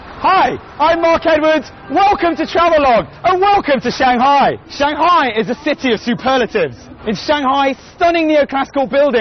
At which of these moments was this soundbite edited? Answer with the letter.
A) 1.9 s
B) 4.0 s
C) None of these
C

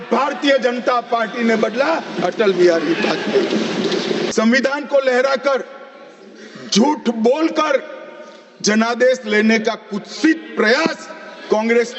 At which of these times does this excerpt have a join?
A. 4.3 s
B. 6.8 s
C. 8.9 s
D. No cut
A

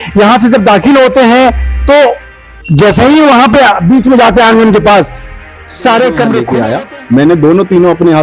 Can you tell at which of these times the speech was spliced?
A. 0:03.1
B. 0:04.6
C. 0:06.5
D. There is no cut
C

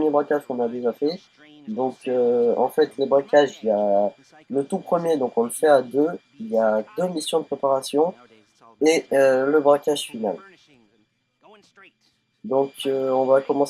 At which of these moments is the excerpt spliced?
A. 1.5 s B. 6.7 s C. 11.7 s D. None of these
B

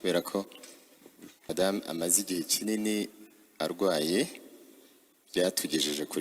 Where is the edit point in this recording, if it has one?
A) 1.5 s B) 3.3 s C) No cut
A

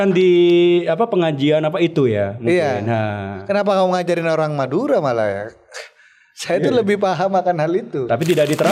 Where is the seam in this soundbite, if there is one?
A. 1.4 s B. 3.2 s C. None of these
C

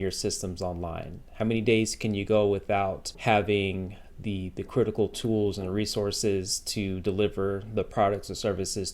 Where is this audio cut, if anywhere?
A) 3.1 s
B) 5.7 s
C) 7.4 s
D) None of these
A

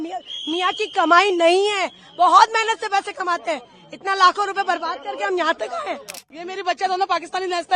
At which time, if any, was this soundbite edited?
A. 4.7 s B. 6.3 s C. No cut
B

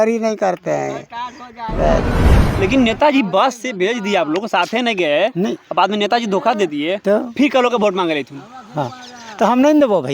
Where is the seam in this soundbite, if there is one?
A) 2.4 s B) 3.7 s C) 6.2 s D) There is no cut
A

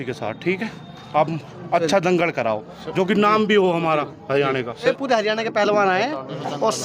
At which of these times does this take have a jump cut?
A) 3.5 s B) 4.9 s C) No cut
B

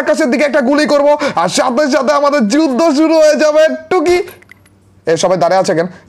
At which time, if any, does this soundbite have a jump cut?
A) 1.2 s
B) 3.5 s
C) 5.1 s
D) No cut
D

